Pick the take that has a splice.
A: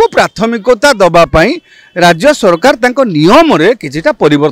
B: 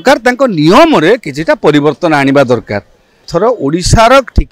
B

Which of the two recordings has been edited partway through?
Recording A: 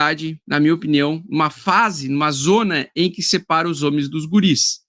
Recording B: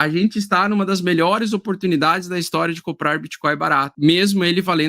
B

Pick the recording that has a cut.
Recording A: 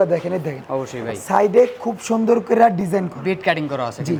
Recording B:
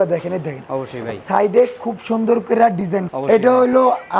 B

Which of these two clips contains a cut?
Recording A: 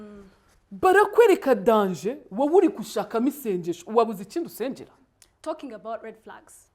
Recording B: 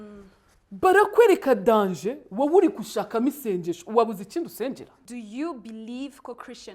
B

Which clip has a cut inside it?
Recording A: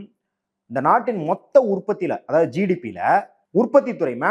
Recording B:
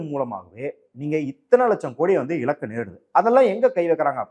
A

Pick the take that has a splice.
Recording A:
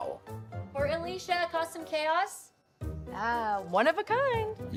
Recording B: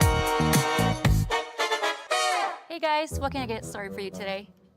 B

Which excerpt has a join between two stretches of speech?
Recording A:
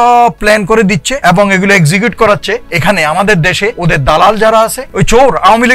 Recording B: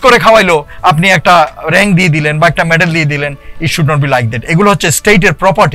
A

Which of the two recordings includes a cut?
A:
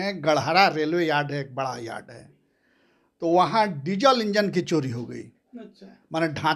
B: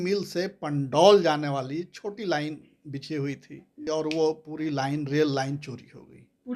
B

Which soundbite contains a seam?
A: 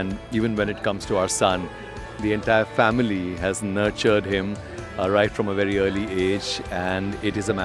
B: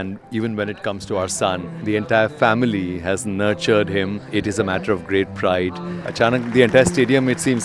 B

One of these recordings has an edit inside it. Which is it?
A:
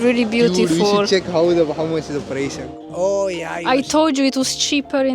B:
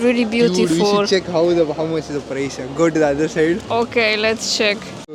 A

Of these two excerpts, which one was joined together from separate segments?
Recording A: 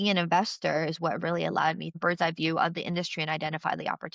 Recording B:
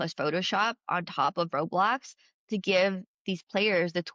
A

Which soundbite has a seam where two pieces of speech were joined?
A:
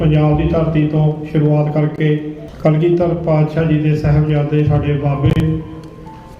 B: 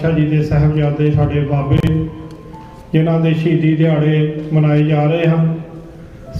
A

